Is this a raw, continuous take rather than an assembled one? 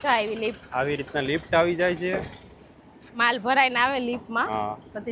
yes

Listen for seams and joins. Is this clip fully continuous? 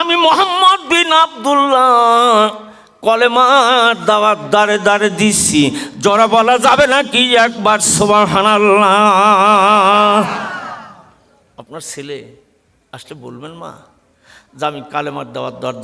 yes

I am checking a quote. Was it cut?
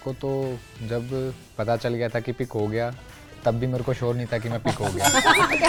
no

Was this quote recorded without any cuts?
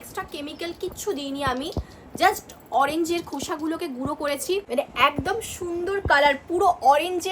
no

